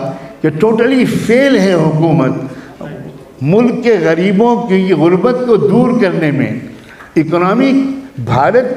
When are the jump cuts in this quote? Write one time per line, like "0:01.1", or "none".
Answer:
none